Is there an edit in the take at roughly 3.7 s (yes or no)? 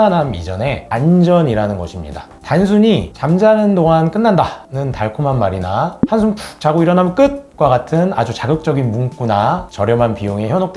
no